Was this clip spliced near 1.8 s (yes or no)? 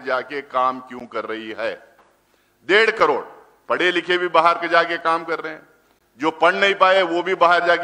no